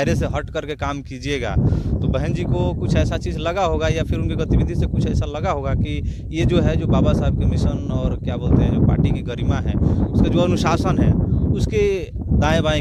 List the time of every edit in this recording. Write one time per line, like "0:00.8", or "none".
none